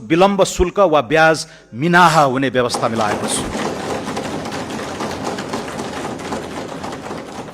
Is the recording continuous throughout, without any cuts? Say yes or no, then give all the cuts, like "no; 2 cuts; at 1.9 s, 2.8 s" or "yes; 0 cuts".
yes; 0 cuts